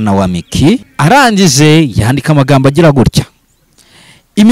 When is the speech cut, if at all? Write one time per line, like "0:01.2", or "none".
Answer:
0:00.9